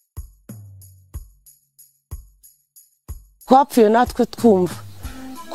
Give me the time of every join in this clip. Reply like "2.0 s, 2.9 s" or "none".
none